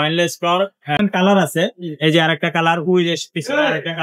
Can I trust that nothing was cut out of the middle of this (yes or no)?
no